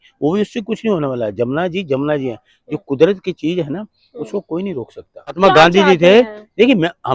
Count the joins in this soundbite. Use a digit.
1